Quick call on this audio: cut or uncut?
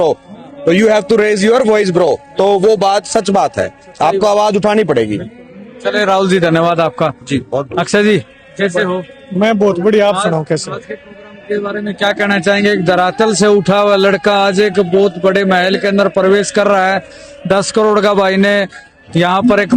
uncut